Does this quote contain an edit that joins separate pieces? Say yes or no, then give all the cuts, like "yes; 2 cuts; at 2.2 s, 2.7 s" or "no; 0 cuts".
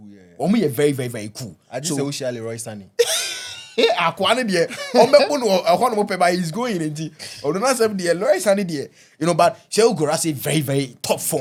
no; 0 cuts